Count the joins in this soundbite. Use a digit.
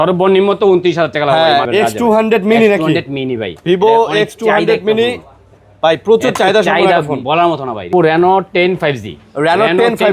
2